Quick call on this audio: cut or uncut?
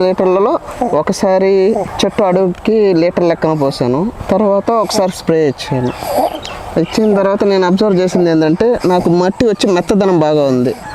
cut